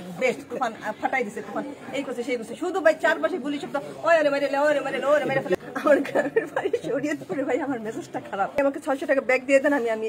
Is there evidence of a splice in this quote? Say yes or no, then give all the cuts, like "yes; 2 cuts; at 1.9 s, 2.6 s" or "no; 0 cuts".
yes; 2 cuts; at 5.6 s, 8.6 s